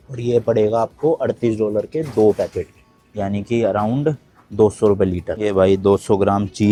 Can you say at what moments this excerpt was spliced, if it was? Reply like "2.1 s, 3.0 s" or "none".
none